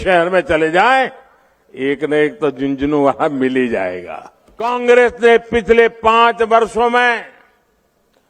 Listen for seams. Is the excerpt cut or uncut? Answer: cut